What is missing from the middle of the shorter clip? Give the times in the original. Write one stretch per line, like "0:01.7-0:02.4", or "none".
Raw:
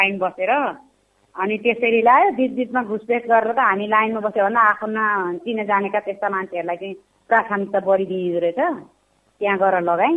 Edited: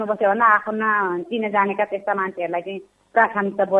none